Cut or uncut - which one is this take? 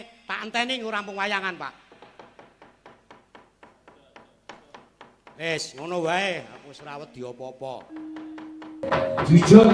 cut